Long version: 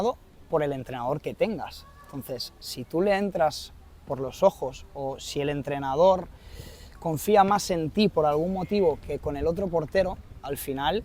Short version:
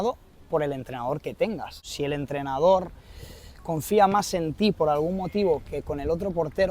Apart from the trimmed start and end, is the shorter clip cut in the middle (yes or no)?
yes